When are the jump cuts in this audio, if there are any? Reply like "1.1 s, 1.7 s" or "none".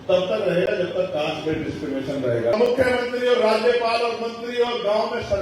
2.5 s